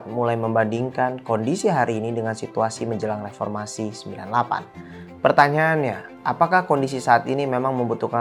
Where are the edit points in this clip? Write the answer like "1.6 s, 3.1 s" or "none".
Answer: none